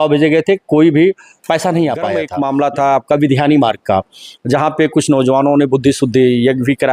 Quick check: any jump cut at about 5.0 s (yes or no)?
no